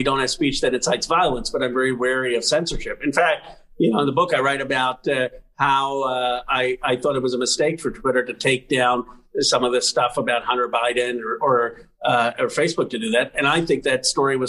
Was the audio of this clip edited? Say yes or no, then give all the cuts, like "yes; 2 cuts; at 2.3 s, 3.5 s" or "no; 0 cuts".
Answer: no; 0 cuts